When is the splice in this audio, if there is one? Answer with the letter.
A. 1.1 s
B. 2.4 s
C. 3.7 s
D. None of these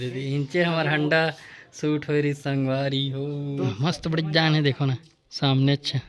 C